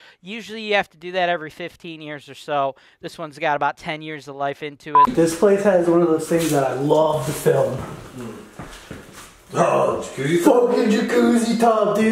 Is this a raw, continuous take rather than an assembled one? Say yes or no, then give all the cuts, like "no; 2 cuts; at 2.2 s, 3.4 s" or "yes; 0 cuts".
no; 1 cut; at 5.1 s